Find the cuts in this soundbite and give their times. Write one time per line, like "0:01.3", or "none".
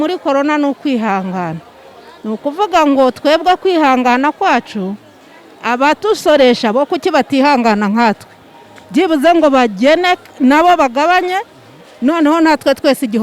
none